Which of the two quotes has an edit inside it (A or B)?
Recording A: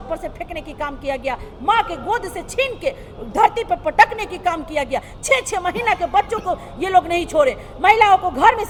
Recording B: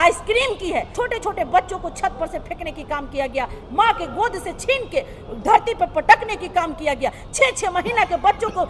B